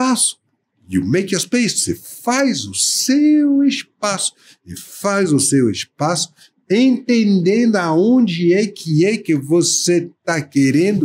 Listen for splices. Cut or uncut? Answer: uncut